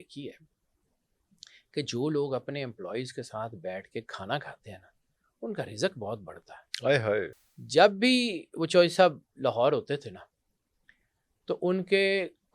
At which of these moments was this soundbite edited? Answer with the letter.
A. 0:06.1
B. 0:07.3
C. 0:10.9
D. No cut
B